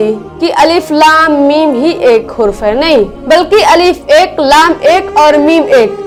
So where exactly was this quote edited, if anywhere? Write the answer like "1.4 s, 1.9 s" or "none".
none